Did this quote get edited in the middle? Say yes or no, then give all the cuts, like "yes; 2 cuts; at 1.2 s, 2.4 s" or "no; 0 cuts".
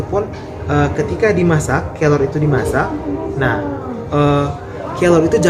no; 0 cuts